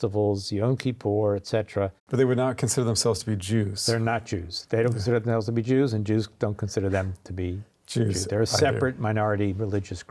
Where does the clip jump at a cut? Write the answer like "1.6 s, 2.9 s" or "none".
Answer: 2.0 s